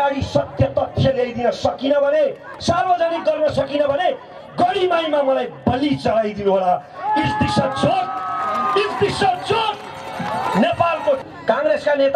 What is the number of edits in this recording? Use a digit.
1